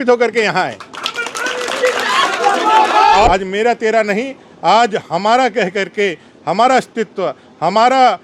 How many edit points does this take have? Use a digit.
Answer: 1